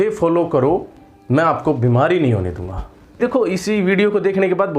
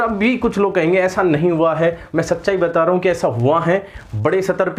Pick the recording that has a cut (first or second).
first